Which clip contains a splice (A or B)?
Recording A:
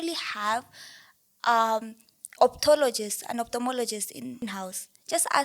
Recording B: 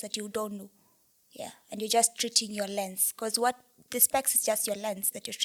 A